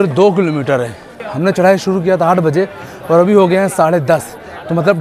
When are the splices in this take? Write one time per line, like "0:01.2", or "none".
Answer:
0:01.2